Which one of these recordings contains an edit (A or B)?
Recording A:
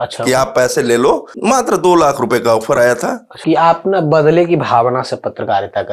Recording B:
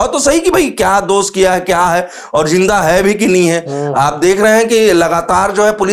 A